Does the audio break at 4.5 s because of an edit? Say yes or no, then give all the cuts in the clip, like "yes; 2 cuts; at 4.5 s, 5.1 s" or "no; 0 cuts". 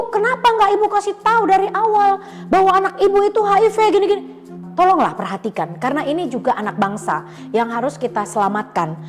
yes; 1 cut; at 4.5 s